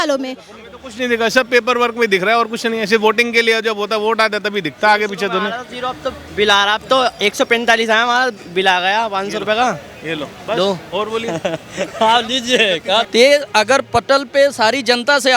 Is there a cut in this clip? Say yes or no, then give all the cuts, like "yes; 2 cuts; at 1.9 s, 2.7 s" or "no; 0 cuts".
yes; 1 cut; at 13.1 s